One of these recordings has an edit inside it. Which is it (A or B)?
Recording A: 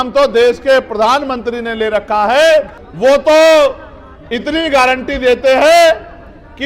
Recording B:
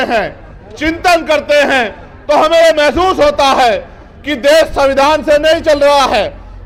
A